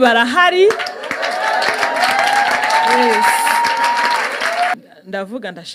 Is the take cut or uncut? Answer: cut